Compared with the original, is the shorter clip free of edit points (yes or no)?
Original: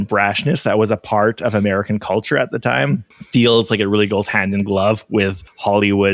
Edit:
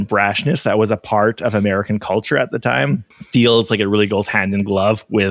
yes